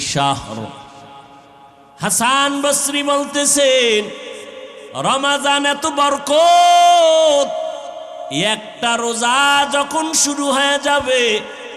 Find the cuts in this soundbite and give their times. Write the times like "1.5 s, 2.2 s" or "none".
1.7 s